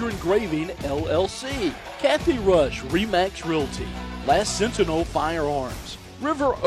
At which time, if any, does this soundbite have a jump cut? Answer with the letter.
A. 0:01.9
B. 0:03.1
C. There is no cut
A